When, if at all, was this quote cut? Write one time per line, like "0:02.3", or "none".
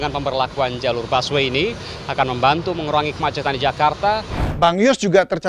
0:04.4